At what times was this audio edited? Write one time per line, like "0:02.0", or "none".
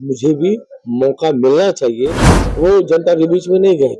0:02.3